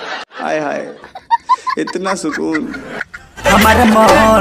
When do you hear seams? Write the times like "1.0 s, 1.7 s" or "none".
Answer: 3.4 s